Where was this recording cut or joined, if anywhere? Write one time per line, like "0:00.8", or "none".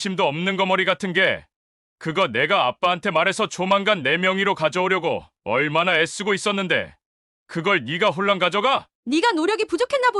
none

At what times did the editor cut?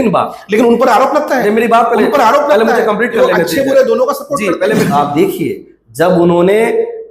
0:04.9

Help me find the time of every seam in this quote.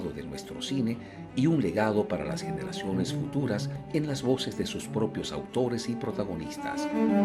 none

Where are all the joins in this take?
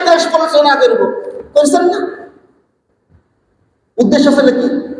none

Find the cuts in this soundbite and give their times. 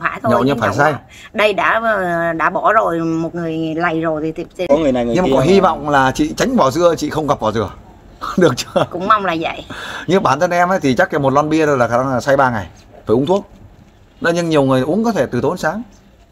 0:04.7

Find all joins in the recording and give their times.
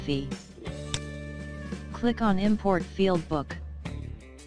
0:03.4

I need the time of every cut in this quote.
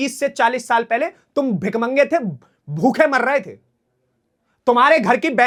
none

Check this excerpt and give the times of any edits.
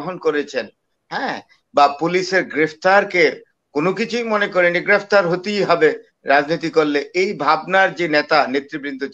none

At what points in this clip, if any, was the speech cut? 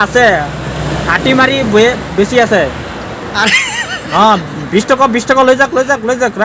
none

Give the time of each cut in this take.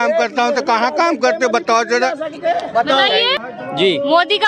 0:03.5

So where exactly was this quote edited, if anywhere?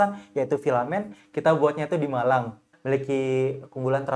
0:02.7

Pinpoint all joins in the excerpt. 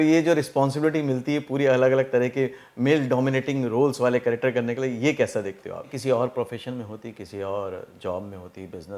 0:06.0

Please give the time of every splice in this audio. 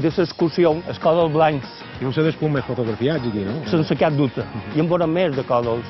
0:00.8
0:01.8
0:03.6

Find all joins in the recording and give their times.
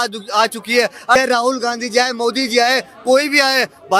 0:01.2

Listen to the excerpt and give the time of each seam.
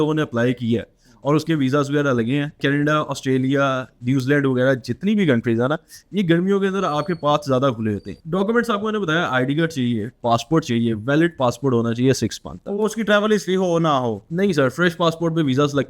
0:02.6
0:08.1

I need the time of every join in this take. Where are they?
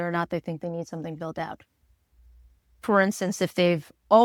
none

